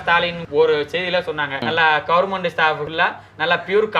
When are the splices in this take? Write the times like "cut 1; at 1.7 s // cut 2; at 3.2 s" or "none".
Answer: none